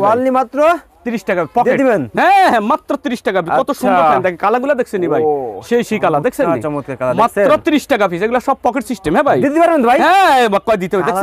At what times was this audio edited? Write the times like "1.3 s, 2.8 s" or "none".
none